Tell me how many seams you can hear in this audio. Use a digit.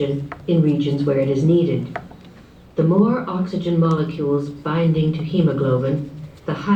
1